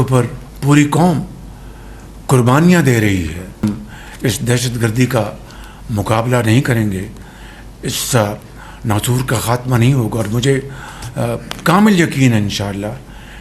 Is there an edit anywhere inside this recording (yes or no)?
yes